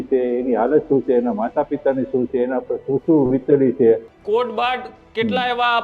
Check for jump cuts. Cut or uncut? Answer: cut